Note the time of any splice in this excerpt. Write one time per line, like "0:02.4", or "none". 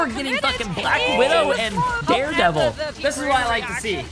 0:02.0
0:02.9